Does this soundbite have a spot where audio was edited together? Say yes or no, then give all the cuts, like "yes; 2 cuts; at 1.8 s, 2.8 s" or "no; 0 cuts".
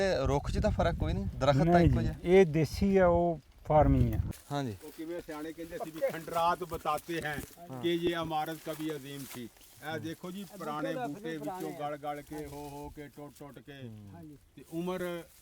yes; 1 cut; at 4.2 s